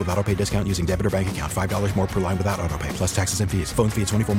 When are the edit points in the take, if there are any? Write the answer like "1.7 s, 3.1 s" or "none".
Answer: none